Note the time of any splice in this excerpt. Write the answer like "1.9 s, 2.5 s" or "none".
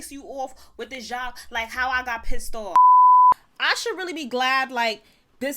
2.7 s, 3.5 s